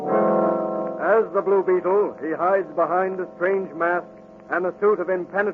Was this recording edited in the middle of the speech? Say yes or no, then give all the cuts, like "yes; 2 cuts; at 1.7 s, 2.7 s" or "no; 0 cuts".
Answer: no; 0 cuts